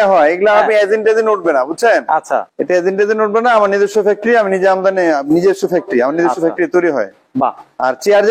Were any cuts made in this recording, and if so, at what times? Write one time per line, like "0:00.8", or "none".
0:02.5